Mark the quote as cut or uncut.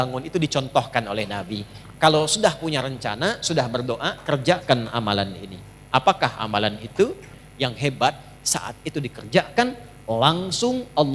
cut